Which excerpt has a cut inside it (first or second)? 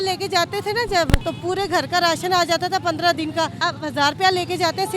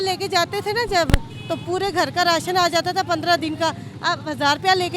first